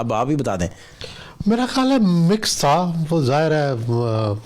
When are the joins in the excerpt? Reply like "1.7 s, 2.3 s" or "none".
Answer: none